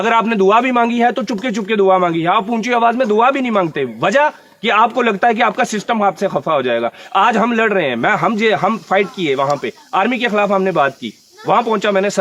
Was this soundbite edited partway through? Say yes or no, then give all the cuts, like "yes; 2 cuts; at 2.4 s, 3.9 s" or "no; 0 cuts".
no; 0 cuts